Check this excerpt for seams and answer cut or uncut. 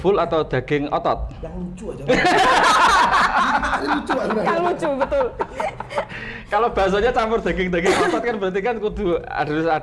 uncut